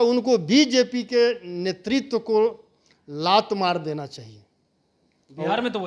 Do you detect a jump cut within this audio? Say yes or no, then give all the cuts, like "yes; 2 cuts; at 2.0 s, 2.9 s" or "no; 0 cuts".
no; 0 cuts